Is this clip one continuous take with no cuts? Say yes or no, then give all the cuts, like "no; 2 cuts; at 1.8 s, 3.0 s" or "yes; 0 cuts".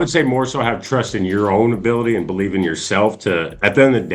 yes; 0 cuts